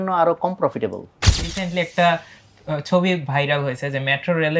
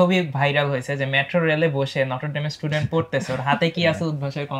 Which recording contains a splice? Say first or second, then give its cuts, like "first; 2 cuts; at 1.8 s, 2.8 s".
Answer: first; 1 cut; at 1.6 s